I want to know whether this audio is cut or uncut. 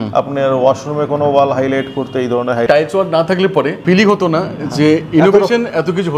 cut